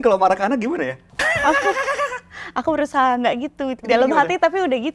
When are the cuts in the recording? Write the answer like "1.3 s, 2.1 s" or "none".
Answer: 1.1 s